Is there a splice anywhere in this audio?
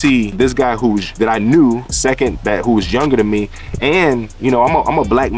yes; 2 cuts; at 0.7 s, 1.9 s

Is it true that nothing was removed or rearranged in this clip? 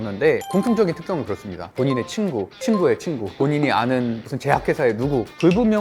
no; 1 cut; at 1.5 s

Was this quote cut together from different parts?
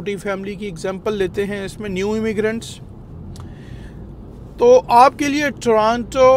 no; 0 cuts

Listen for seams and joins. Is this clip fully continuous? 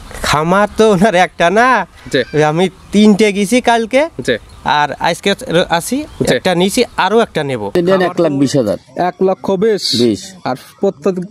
no; 1 cut; at 7.7 s

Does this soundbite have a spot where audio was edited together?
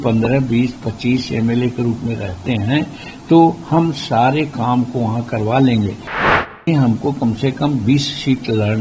yes; 1 cut; at 6.5 s

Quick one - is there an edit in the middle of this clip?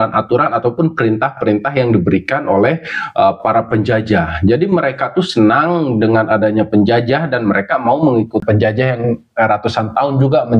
yes; 1 cut; at 8.4 s

